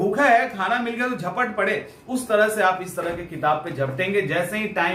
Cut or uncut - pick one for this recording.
uncut